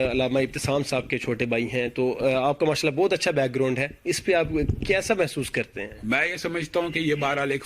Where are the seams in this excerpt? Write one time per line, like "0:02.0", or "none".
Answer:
none